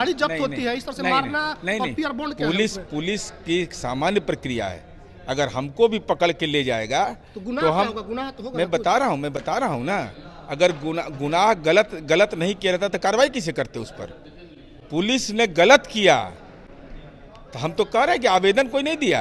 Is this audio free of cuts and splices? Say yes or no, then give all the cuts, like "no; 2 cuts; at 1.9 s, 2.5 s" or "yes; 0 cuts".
yes; 0 cuts